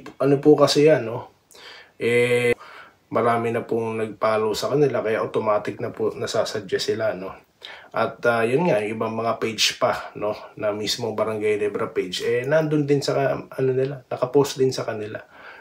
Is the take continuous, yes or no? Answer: no